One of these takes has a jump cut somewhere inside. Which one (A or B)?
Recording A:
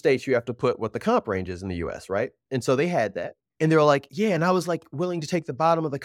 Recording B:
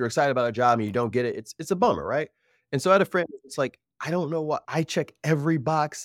B